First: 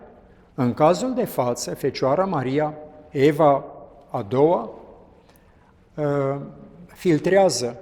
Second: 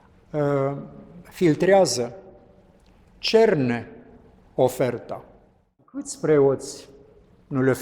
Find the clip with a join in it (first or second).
second